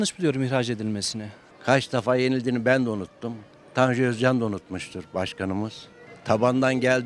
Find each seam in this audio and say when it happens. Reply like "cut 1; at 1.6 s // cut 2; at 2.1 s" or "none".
cut 1; at 1.4 s // cut 2; at 6.0 s